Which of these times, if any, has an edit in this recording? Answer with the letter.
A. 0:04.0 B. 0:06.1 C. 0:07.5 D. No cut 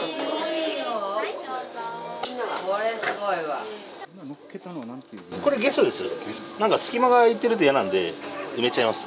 A